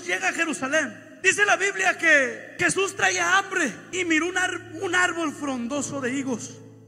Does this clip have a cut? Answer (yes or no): yes